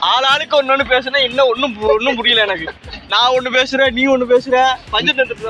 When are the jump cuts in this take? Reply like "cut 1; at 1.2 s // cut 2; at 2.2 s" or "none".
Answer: none